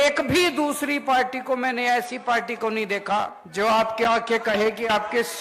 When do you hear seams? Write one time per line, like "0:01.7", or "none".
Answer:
0:03.4